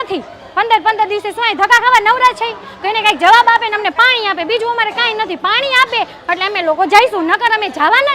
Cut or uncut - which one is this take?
uncut